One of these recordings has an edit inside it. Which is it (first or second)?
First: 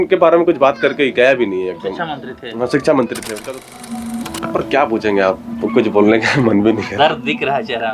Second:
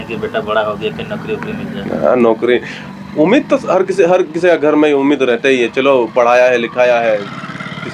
first